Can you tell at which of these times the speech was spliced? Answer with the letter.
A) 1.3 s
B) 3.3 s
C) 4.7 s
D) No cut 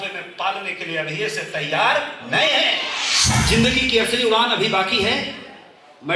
B